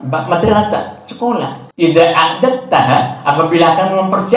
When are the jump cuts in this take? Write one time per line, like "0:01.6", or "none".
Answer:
0:01.6